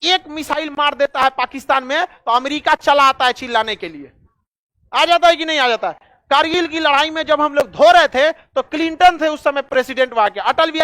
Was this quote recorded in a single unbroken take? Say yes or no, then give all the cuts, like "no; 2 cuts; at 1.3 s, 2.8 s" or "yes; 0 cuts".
yes; 0 cuts